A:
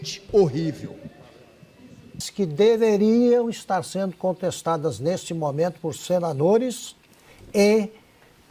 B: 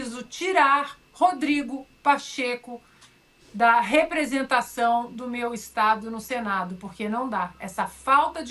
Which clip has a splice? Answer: A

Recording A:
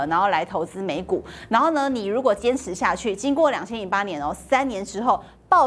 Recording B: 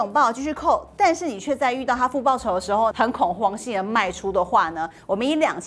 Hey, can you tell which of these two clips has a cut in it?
B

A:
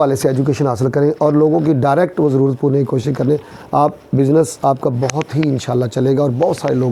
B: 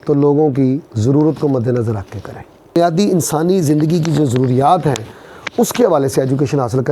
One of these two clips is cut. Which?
B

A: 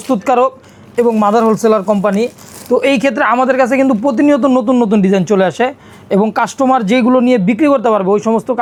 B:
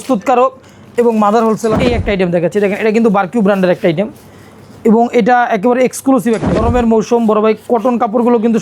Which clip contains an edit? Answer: B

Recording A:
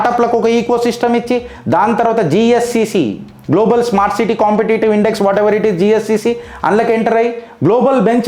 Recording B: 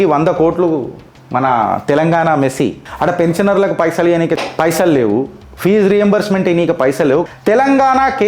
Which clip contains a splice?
B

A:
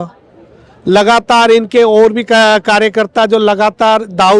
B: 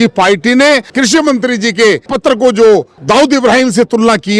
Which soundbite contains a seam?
B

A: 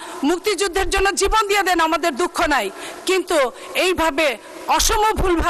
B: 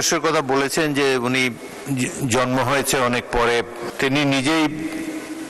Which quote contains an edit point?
B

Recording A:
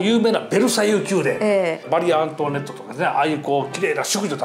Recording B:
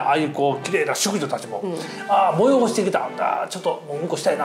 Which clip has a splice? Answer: A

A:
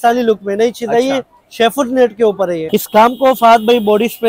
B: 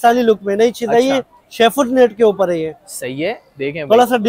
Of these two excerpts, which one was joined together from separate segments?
A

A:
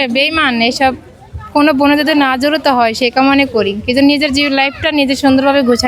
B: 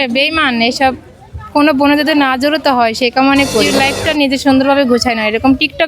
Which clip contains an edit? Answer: B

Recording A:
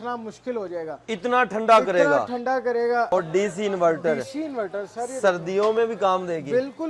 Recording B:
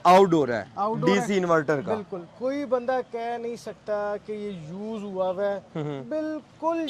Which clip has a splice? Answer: A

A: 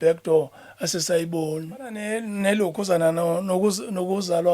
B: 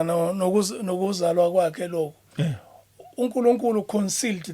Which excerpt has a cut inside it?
A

